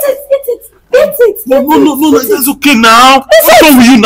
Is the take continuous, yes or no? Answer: yes